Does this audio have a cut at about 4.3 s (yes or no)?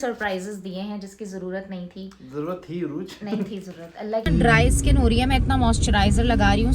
yes